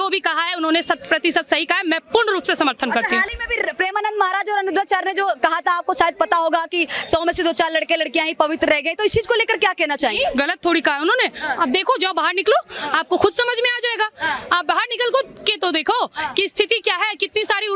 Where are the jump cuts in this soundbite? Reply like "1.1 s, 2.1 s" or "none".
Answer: none